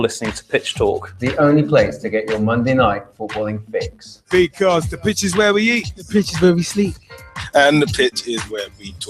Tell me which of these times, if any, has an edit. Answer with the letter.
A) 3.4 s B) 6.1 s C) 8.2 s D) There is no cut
C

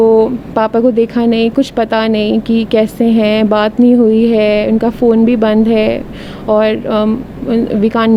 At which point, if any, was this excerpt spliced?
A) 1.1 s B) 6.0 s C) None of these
C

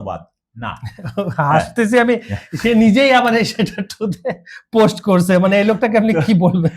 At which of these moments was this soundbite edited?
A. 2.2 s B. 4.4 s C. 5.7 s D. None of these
D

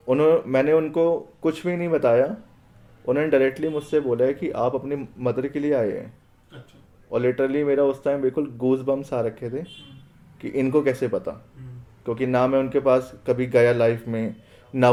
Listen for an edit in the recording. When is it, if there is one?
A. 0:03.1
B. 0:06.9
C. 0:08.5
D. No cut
D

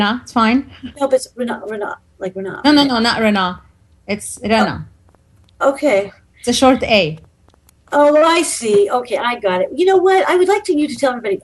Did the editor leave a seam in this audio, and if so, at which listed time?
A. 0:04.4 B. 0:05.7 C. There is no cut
B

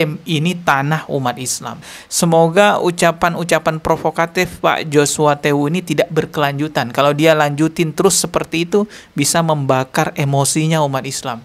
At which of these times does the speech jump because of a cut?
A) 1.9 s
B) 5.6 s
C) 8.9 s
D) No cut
A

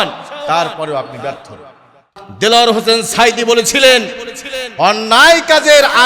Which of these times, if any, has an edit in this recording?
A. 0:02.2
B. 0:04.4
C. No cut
A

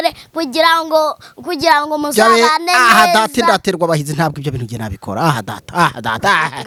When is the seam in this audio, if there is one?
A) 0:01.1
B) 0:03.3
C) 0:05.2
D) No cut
D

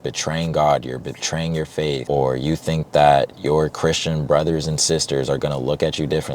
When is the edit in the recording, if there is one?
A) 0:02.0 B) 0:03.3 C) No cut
A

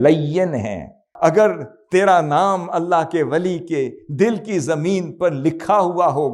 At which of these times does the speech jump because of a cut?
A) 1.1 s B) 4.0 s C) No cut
A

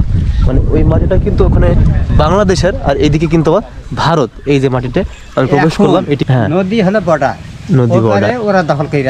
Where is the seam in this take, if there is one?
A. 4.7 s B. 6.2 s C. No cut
B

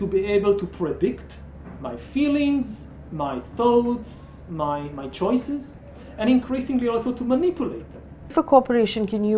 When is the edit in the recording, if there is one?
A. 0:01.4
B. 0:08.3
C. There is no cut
B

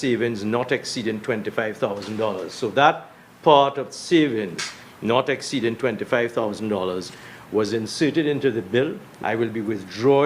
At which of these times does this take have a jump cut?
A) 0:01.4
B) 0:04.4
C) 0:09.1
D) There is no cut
C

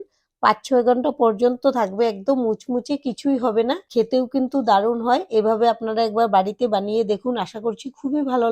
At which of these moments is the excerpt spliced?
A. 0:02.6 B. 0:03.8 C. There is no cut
B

